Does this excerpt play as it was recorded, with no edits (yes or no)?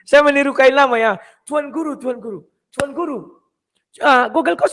yes